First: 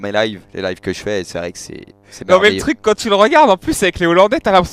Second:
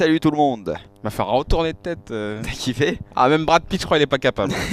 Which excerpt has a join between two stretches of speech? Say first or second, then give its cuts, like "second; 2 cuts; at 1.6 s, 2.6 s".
first; 1 cut; at 3.5 s